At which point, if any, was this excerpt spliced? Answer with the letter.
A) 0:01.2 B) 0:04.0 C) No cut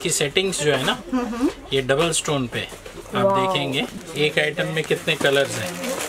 B